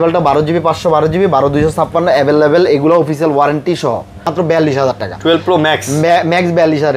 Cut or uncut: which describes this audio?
cut